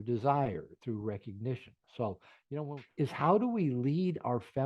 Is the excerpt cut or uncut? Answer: cut